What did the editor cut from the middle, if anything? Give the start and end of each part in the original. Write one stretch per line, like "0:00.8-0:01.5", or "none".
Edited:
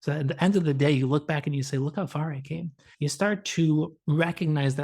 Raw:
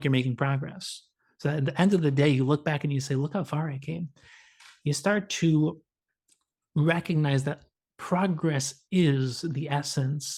0:04.2-0:04.7
0:05.8-0:06.6